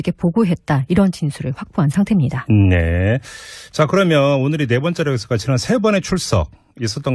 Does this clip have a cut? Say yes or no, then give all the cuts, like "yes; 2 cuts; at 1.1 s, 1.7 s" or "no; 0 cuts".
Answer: yes; 1 cut; at 4.2 s